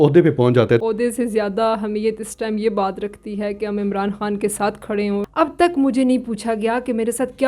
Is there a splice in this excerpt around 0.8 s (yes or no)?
yes